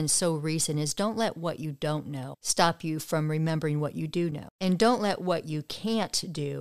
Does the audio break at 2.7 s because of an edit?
no; 1 cut; at 4.5 s

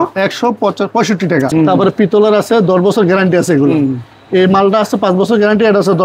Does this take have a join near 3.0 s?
no; 1 cut; at 1.5 s

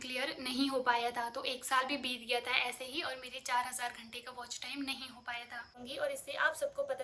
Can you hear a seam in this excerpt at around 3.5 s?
no; 1 cut; at 5.8 s

